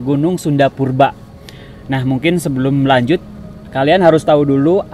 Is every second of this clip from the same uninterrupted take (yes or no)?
yes